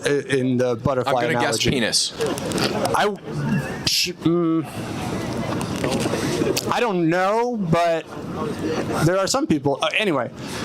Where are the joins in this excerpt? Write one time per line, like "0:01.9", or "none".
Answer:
none